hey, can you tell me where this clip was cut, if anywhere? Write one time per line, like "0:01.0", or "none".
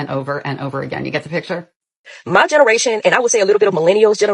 0:02.3